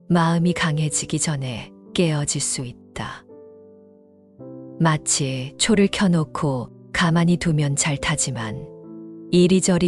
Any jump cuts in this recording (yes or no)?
no